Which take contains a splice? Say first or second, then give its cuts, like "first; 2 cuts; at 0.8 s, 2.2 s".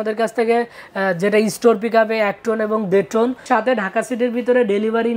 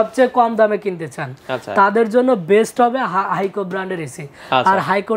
first; 1 cut; at 3.4 s